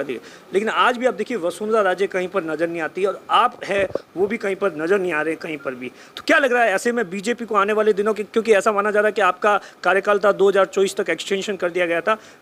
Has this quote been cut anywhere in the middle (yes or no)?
no